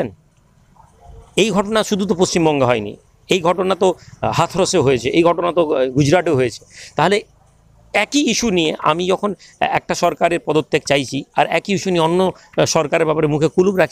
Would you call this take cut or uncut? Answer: uncut